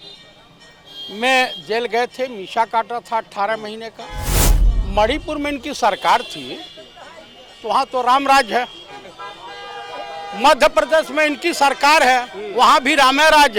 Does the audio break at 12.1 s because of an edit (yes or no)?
no